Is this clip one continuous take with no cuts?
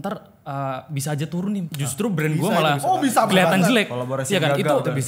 no; 1 cut; at 1.7 s

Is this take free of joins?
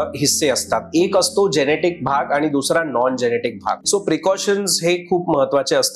no; 1 cut; at 3.8 s

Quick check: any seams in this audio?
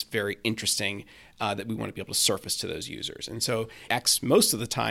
yes; 1 cut; at 3.8 s

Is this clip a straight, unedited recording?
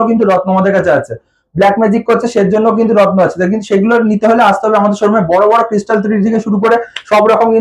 yes; 0 cuts

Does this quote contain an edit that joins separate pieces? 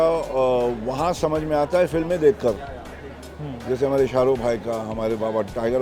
no; 0 cuts

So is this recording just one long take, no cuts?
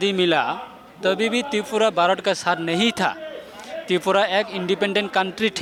yes; 0 cuts

